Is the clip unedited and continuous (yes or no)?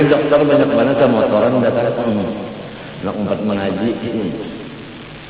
yes